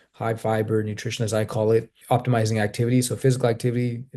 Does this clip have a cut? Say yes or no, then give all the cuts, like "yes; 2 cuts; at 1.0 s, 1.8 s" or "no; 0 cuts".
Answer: yes; 1 cut; at 2.0 s